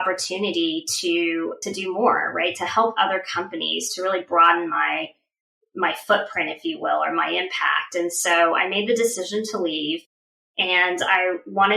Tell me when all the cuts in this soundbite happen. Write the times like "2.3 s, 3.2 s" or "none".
1.6 s